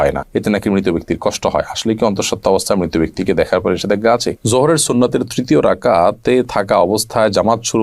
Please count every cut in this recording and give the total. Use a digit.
1